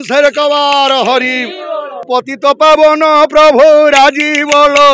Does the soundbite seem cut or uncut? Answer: cut